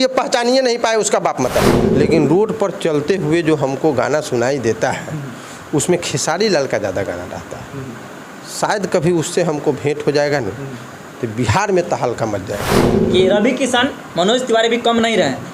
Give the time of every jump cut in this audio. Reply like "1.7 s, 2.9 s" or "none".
1.8 s, 12.9 s

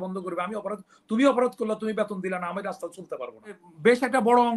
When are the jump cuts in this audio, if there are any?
3.6 s

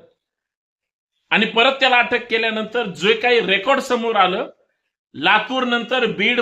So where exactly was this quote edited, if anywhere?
none

